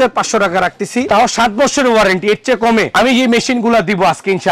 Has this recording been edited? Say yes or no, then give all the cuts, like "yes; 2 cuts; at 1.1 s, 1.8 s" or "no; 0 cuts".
no; 0 cuts